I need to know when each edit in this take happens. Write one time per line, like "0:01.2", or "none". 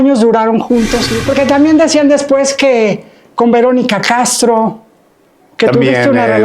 0:01.1